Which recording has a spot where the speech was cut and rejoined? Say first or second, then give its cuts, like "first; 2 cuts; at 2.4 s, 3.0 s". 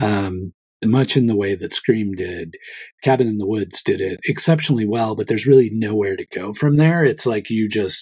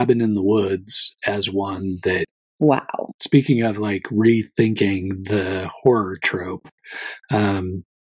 second; 2 cuts; at 2.4 s, 3.1 s